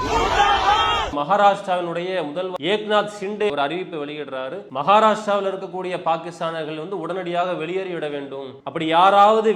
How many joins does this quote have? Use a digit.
5